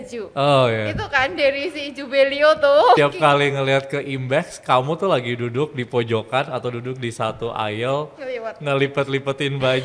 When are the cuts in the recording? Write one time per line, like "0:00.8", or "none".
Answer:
0:03.0